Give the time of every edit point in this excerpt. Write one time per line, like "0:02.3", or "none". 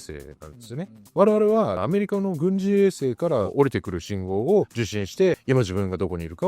0:01.0
0:01.8
0:05.4